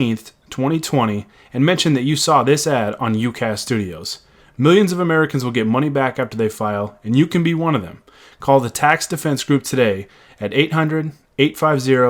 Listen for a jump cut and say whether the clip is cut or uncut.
uncut